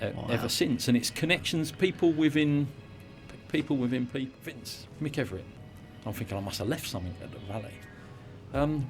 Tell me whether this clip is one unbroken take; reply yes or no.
no